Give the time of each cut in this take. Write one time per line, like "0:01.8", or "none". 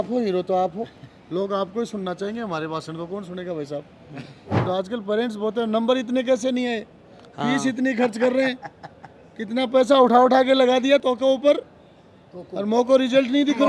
0:04.6
0:11.0